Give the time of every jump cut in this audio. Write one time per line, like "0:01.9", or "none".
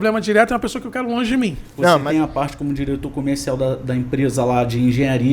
0:02.0